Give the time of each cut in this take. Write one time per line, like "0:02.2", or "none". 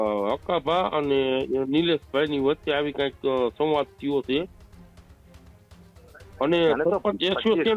none

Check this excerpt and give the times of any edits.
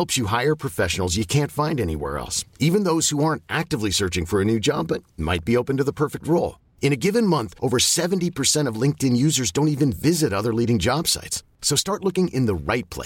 none

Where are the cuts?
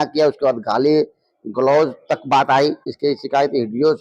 0:02.9

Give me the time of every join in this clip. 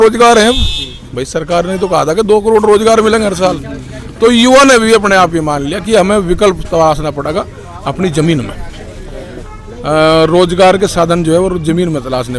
none

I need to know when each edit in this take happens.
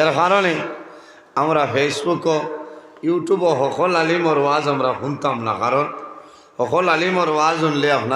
0:03.2

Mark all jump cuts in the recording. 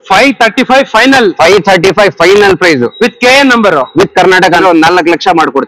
0:04.6

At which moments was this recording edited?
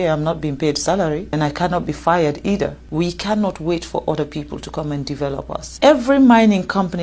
0:01.3
0:02.8
0:05.7

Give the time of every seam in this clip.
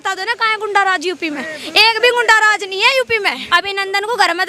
0:03.4

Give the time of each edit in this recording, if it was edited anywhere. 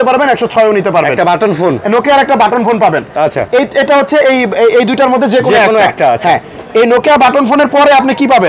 none

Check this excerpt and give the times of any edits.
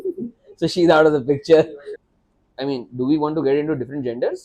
0:01.8

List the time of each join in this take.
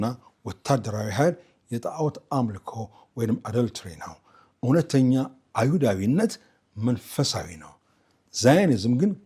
none

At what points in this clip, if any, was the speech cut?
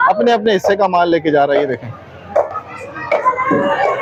none

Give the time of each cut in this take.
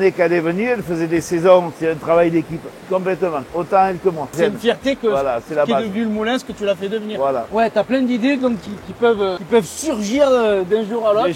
0:01.7
0:04.3
0:07.5

